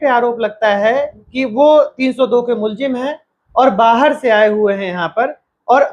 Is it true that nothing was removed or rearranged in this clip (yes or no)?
yes